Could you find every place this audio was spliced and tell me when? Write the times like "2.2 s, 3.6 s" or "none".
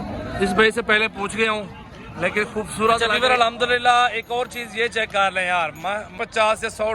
3.1 s, 6.1 s